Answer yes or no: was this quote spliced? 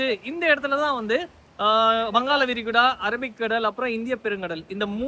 no